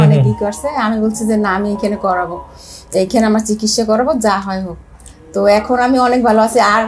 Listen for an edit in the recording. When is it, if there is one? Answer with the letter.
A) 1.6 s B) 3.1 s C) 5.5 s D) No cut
D